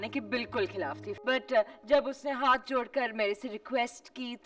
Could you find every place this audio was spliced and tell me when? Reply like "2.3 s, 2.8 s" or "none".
1.1 s